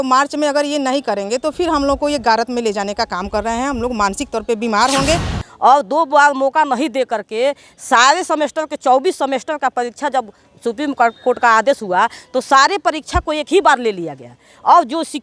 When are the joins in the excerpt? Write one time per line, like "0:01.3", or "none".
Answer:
0:05.3